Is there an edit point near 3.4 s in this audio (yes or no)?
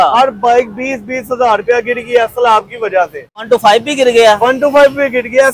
yes